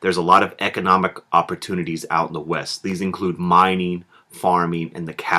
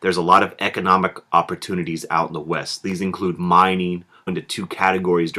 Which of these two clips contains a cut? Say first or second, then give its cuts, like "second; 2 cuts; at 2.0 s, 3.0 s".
first; 1 cut; at 4.3 s